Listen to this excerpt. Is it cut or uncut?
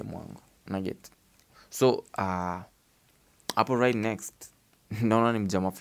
uncut